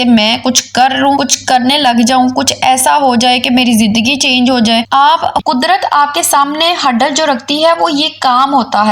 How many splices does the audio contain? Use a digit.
1